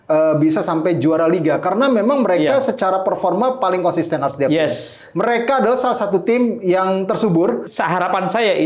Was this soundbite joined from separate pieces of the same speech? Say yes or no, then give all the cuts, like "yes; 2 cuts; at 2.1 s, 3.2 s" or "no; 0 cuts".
yes; 1 cut; at 7.7 s